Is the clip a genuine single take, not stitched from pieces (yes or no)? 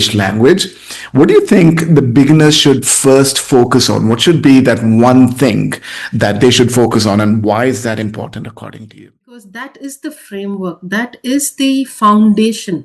no